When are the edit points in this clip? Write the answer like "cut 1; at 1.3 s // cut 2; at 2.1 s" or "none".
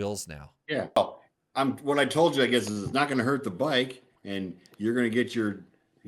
cut 1; at 1.0 s